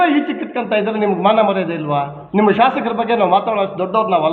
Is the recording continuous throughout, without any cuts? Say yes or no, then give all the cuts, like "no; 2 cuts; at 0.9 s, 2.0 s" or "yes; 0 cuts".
no; 1 cut; at 2.2 s